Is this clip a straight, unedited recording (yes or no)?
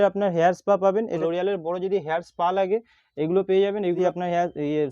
no